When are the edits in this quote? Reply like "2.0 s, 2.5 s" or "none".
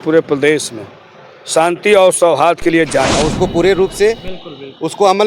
3.1 s